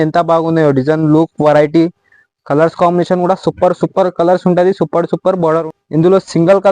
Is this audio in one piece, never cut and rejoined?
no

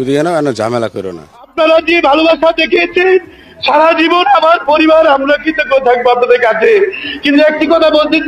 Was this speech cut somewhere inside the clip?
yes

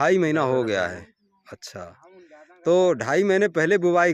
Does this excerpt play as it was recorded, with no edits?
yes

